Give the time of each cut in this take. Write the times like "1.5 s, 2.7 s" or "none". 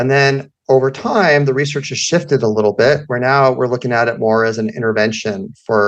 none